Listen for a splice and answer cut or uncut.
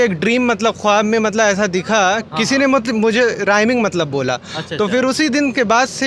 uncut